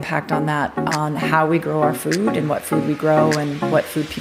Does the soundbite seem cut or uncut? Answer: uncut